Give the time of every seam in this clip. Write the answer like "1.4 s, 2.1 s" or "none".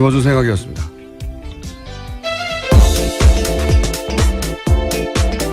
none